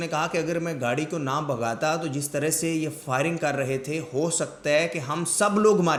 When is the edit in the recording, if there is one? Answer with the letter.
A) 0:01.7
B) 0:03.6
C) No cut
C